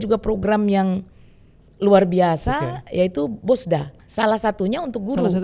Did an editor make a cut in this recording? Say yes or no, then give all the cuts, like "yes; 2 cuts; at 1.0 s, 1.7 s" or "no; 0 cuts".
yes; 1 cut; at 4.0 s